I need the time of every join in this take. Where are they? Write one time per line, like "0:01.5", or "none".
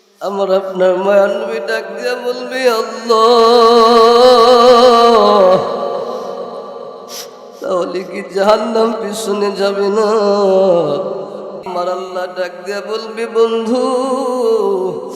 0:11.6